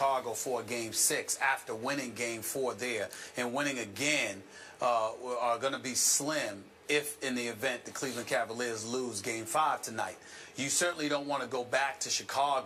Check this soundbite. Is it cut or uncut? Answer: uncut